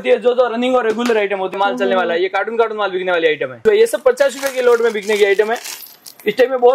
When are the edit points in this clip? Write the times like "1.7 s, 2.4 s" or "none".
1.5 s, 3.6 s